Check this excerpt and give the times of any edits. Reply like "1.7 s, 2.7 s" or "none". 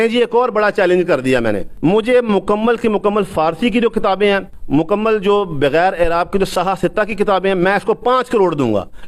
1.7 s, 4.5 s